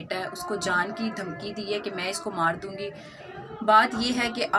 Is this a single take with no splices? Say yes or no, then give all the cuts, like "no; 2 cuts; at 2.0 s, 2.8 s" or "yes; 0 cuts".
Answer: yes; 0 cuts